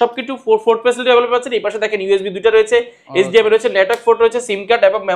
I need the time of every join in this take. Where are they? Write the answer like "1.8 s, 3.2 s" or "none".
none